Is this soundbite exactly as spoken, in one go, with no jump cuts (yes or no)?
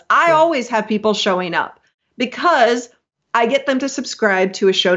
yes